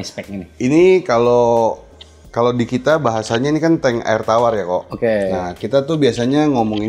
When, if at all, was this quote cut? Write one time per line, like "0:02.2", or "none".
none